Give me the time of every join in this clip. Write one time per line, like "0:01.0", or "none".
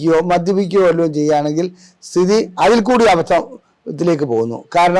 none